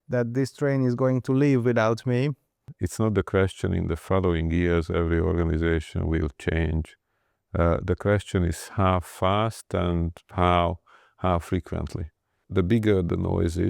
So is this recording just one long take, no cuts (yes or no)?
no